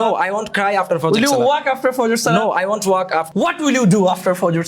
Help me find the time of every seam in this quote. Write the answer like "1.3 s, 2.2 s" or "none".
3.3 s